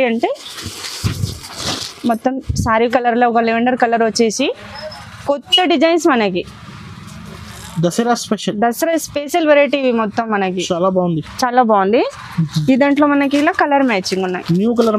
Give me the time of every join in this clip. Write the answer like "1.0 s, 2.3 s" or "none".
2.9 s

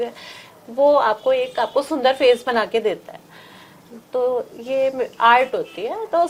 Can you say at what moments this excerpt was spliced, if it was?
none

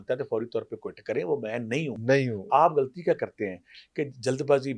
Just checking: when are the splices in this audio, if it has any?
none

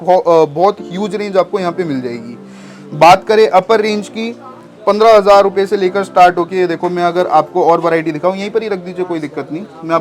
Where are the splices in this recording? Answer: none

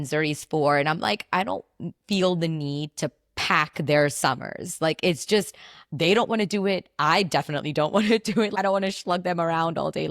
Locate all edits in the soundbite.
8.5 s

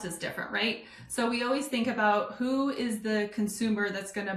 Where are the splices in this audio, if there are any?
none

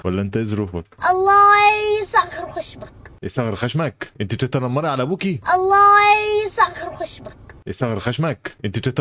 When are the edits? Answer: 0.9 s, 5.4 s

